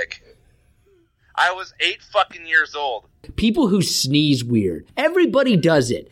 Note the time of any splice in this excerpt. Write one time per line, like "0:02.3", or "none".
0:03.3
0:04.9